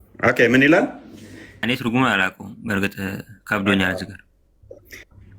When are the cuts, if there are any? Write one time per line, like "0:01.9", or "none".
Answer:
0:01.6